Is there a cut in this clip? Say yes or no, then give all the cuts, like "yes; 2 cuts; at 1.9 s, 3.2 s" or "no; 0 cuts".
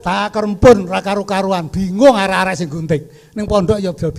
no; 0 cuts